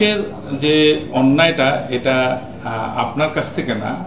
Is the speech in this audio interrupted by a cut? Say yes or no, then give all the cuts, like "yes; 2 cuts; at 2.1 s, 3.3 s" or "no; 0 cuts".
no; 0 cuts